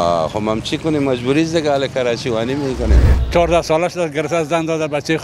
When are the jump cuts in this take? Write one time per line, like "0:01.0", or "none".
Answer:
0:03.1

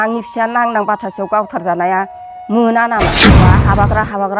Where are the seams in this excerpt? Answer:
0:03.3

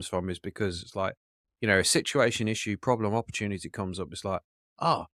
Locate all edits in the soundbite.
none

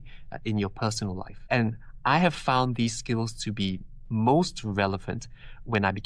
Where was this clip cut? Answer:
0:01.3

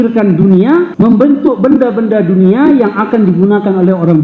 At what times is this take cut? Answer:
0:01.1

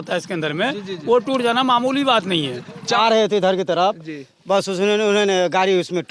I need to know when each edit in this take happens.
0:02.9

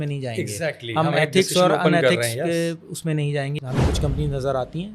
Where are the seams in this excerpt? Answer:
0:03.6

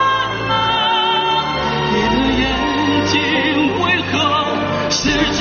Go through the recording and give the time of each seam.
none

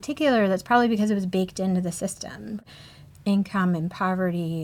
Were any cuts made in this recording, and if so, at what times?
0:02.6

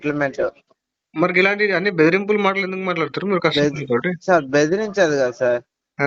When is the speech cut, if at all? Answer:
none

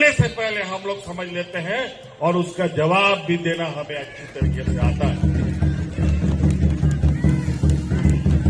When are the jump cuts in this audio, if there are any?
none

